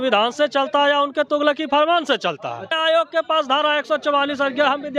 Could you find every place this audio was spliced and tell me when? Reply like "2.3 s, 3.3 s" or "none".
2.7 s